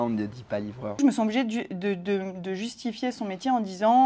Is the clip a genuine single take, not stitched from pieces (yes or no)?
no